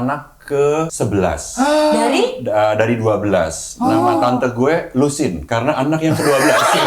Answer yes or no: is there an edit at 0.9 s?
yes